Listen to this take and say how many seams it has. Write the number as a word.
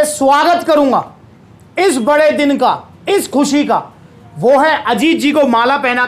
zero